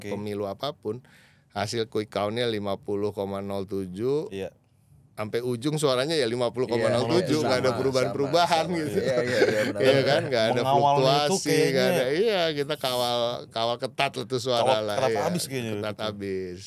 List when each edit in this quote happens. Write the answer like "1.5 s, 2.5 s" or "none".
none